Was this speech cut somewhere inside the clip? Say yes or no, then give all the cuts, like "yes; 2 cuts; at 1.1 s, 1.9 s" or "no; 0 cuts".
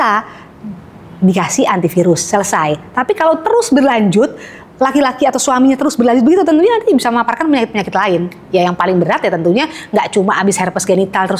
no; 0 cuts